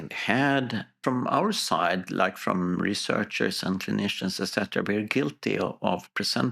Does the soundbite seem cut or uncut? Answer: cut